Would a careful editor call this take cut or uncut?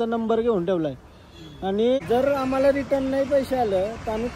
cut